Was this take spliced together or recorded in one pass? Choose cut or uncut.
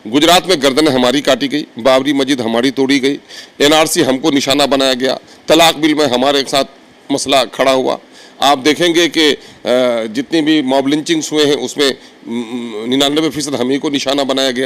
uncut